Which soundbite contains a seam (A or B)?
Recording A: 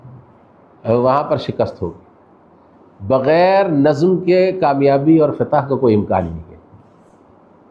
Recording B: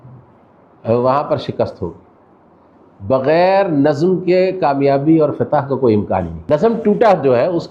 B